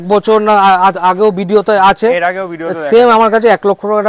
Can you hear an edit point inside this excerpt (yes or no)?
no